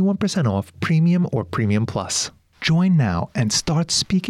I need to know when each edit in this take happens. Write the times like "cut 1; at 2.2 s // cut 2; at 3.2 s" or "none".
none